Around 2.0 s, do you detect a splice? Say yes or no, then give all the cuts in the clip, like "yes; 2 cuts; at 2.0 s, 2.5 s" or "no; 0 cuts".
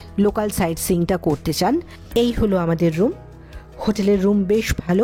yes; 1 cut; at 2.0 s